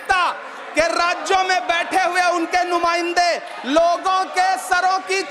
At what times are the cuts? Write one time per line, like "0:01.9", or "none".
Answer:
none